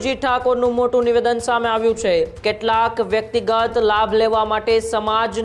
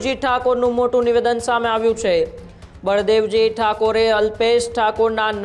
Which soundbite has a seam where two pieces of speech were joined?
first; 1 cut; at 2.4 s

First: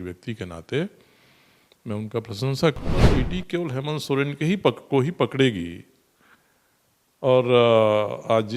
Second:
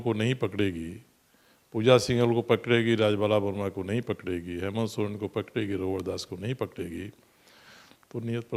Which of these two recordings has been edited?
first; 1 cut; at 3.1 s

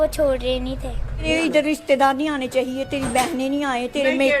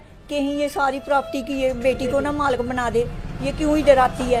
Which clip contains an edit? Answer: first; 1 cut; at 1.3 s

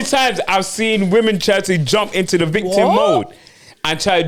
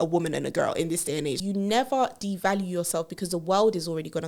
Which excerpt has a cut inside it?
second; 1 cut; at 1.4 s

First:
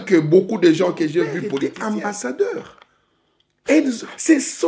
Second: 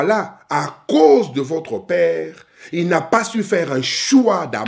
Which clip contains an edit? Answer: first; 1 cut; at 1.5 s

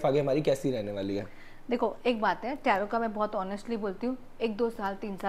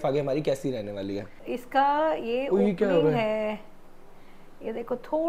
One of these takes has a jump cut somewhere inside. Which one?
second; 1 cut; at 1.4 s

